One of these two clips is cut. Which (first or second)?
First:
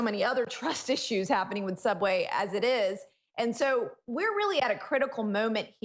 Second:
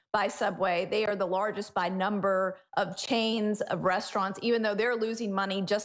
first